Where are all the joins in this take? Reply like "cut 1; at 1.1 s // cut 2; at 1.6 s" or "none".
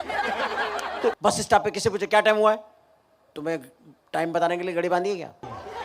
cut 1; at 1.2 s